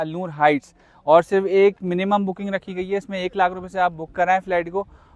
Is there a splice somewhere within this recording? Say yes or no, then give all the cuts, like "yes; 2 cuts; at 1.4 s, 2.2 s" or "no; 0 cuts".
no; 0 cuts